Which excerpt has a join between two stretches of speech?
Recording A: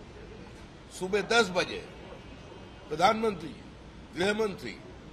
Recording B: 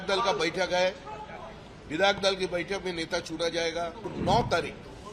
B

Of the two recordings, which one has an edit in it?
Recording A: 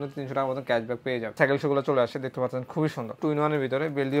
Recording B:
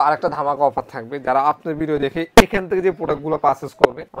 A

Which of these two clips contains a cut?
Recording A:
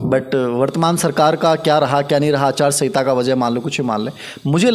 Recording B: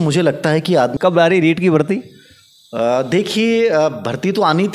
B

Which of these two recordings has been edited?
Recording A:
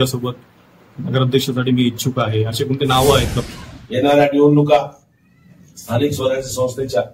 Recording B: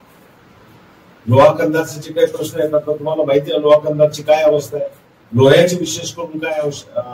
A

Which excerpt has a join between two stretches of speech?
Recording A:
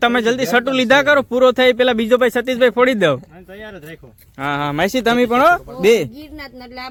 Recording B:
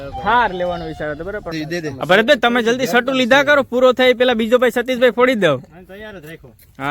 B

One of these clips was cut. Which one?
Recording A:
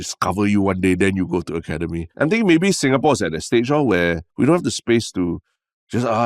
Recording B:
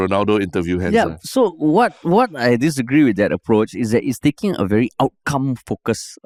A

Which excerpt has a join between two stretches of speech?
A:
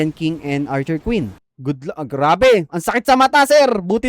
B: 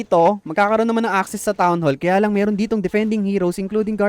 A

